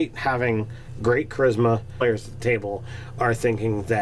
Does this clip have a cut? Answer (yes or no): no